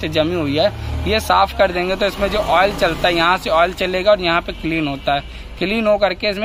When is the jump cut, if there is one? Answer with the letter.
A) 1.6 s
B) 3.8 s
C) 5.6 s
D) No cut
D